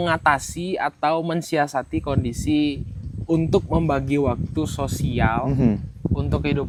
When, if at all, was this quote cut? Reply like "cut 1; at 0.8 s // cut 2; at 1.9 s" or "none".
none